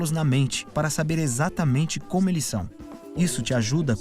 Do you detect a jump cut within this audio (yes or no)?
yes